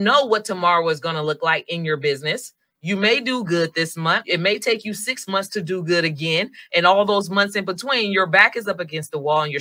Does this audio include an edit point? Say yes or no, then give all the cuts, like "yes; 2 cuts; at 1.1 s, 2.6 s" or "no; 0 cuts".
yes; 1 cut; at 4.2 s